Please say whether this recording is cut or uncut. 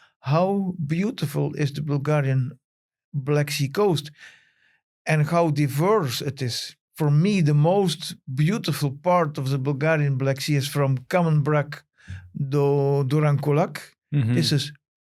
uncut